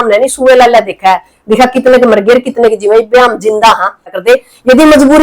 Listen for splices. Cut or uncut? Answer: cut